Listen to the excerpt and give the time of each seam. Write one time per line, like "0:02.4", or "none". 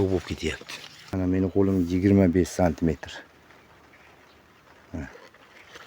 0:01.1